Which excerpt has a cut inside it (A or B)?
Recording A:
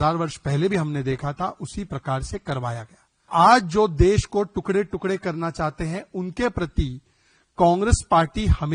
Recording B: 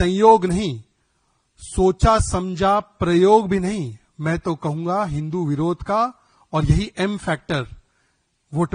A